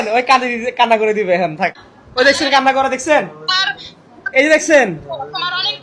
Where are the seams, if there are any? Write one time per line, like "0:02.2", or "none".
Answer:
0:01.9